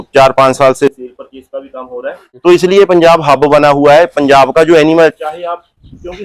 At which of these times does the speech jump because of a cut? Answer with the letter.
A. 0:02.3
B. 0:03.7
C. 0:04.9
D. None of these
A